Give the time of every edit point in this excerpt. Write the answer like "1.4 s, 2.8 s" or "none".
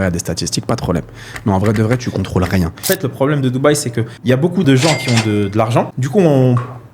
2.8 s, 4.6 s, 6.0 s